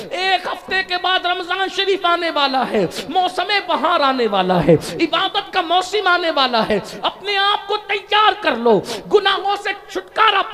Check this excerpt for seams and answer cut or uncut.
uncut